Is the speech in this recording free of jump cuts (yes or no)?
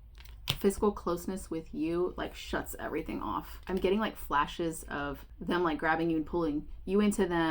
no